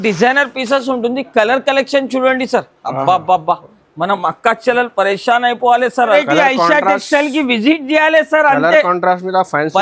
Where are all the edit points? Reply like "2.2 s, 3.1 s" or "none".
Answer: 6.1 s